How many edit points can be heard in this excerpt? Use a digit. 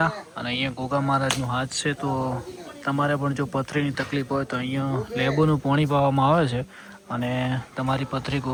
0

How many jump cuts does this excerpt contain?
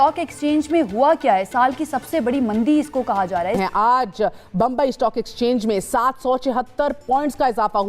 1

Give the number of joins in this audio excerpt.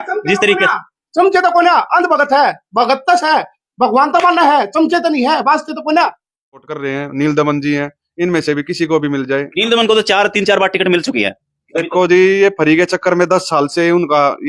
1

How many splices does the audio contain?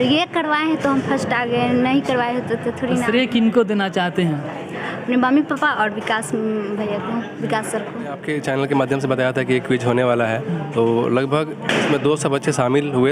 1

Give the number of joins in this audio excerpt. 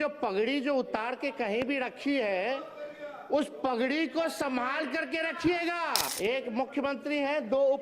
1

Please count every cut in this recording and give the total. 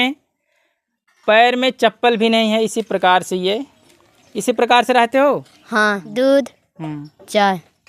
1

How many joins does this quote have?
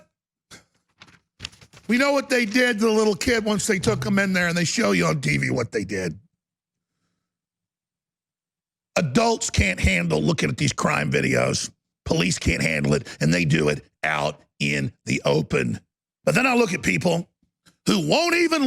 1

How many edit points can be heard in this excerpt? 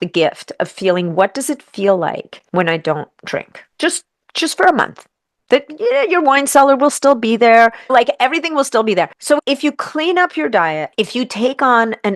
5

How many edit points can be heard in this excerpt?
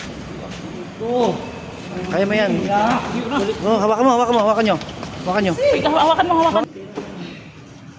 1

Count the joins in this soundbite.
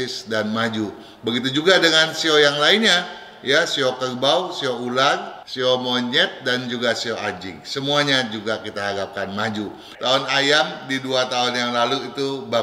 1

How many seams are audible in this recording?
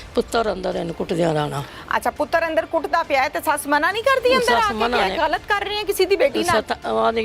0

